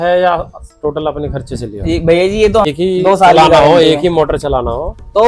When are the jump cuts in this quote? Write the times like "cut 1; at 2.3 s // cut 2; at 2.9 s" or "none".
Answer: cut 1; at 2.7 s